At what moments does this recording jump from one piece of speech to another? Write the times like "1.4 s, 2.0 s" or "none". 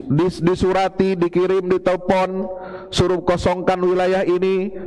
none